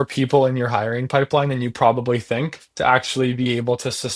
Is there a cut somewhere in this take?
no; 0 cuts

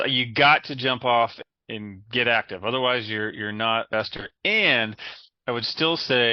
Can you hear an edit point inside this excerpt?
yes; 2 cuts; at 1.4 s, 3.9 s

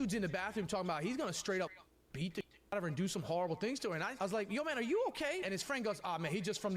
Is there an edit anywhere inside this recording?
yes; 2 cuts; at 4.1 s, 5.4 s

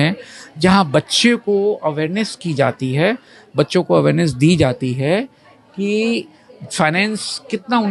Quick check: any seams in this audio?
no; 0 cuts

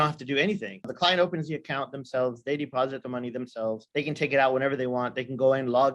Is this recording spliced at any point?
yes; 1 cut; at 0.9 s

